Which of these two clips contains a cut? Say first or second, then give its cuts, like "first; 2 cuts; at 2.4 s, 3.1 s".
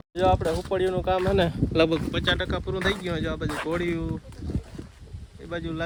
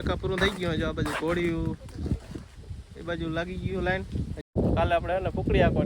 second; 1 cut; at 4.6 s